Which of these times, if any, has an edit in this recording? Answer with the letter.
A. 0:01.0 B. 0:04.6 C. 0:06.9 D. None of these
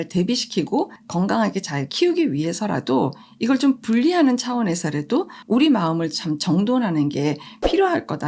A